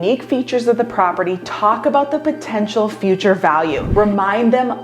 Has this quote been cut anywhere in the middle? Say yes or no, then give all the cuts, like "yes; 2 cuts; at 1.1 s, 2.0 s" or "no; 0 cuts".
yes; 1 cut; at 3.8 s